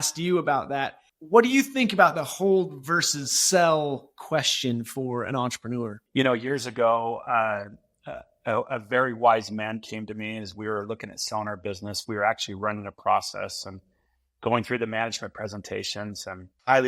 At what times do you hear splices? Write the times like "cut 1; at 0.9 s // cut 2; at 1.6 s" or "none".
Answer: cut 1; at 1.0 s